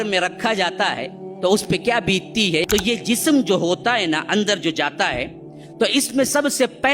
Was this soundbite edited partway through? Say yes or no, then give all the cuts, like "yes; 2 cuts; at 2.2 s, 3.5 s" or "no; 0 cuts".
yes; 1 cut; at 2.7 s